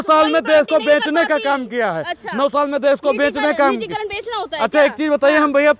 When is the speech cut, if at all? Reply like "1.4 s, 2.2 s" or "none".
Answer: none